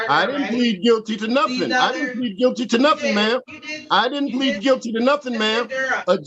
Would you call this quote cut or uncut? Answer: uncut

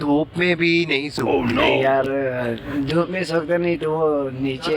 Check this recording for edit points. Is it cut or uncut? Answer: cut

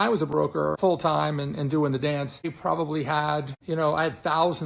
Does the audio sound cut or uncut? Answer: cut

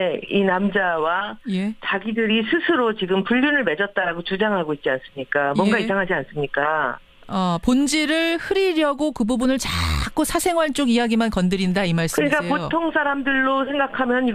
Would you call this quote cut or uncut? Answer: uncut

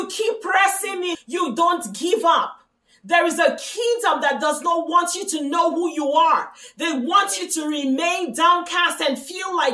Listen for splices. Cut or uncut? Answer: cut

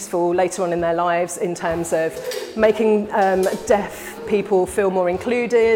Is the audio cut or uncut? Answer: uncut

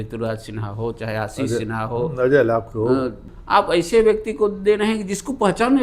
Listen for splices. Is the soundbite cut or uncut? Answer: cut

